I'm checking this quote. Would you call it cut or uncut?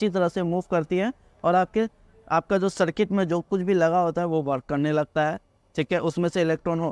uncut